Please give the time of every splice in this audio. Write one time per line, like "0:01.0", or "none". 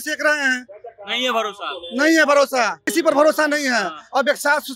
0:02.9